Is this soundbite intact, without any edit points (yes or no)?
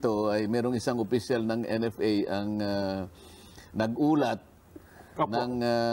yes